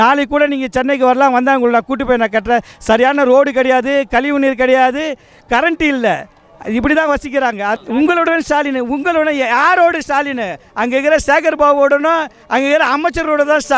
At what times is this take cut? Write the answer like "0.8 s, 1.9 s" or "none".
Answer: 7.8 s